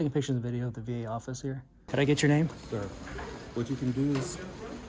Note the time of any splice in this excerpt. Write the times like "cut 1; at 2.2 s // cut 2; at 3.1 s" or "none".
cut 1; at 1.7 s